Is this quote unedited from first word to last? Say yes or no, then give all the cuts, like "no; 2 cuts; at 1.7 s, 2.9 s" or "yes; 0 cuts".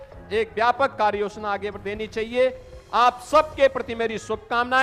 yes; 0 cuts